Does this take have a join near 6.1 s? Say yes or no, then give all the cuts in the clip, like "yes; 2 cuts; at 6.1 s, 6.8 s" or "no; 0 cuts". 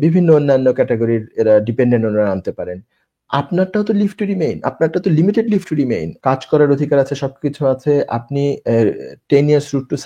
yes; 1 cut; at 6.1 s